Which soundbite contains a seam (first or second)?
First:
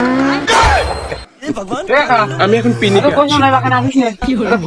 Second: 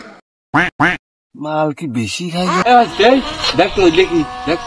second